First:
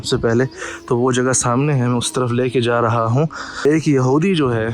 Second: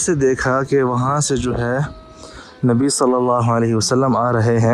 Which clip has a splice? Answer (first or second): first